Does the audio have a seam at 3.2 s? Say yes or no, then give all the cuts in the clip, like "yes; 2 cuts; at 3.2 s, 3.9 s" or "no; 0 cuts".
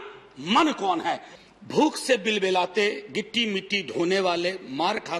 no; 1 cut; at 1.3 s